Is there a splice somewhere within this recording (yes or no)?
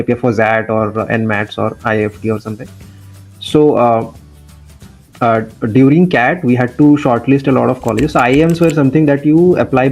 no